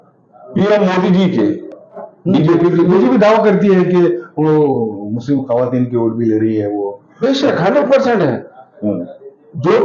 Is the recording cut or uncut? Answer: cut